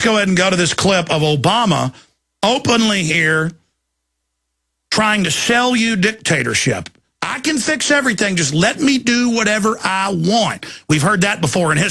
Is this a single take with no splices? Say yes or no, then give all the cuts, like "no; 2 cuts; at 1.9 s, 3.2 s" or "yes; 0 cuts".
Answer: yes; 0 cuts